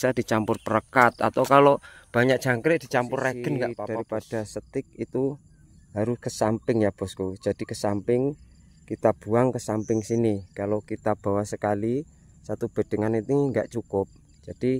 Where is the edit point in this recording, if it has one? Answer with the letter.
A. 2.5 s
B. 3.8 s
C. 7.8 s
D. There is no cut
B